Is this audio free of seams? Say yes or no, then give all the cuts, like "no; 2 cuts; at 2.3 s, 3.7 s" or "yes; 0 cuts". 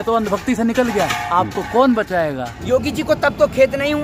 no; 1 cut; at 2.5 s